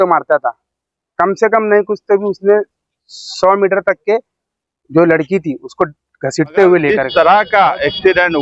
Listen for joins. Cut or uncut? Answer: cut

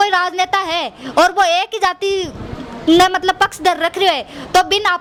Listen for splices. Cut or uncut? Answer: uncut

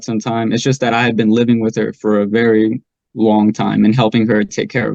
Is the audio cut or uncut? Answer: uncut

